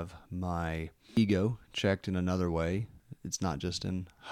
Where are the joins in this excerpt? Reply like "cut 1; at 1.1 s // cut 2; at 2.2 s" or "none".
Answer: cut 1; at 1.2 s // cut 2; at 3.0 s